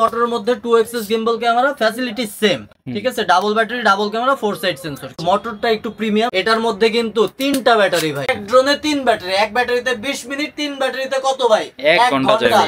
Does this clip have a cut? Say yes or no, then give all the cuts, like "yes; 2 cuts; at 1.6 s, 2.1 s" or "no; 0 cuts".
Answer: yes; 3 cuts; at 5.2 s, 6.3 s, 8.3 s